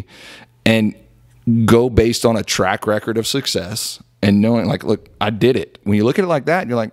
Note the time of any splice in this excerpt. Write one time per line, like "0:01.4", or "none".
0:05.8